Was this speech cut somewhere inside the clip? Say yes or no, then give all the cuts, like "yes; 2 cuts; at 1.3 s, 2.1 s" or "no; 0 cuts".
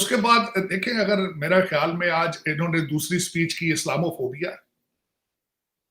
no; 0 cuts